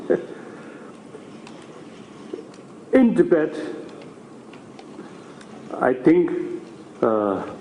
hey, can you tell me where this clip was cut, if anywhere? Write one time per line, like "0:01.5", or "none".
0:06.0